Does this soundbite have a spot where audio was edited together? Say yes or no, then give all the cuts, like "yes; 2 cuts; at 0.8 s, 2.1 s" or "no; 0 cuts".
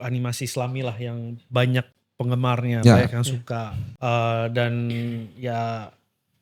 no; 0 cuts